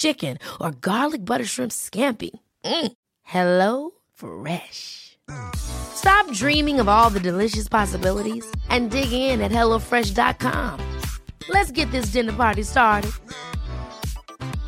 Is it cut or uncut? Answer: uncut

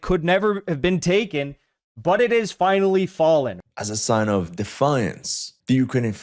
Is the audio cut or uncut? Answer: cut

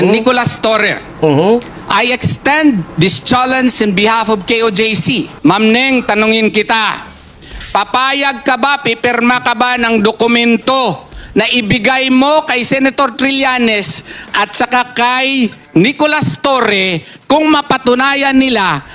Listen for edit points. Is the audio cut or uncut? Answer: cut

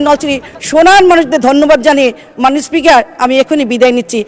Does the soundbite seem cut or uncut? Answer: uncut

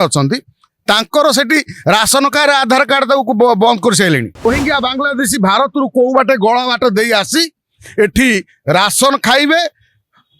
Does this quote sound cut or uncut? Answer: cut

